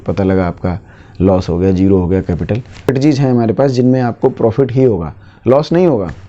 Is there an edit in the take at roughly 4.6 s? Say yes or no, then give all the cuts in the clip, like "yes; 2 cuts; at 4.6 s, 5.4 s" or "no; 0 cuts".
no; 1 cut; at 2.9 s